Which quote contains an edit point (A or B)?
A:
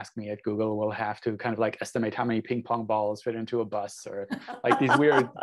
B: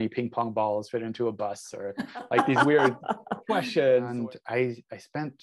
B